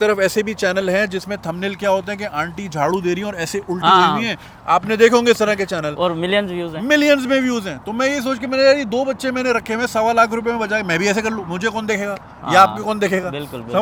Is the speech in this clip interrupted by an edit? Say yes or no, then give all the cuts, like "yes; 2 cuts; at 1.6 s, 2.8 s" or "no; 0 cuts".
no; 0 cuts